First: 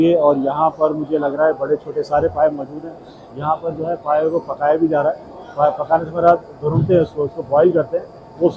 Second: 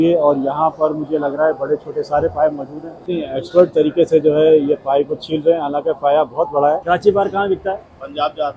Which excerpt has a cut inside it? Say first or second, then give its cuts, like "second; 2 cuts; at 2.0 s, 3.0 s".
second; 2 cuts; at 3.1 s, 6.8 s